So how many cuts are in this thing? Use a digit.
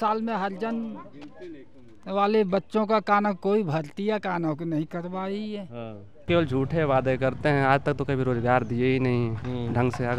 1